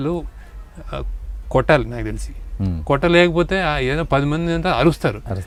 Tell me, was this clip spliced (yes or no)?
no